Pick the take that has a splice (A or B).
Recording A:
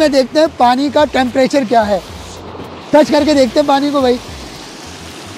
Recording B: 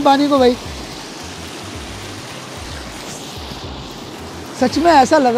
B